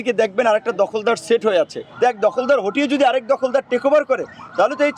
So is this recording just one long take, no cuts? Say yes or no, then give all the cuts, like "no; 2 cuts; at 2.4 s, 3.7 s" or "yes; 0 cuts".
no; 1 cut; at 1.8 s